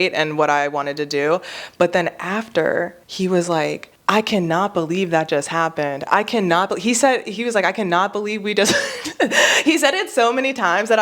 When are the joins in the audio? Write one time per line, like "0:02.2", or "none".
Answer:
0:03.0
0:03.9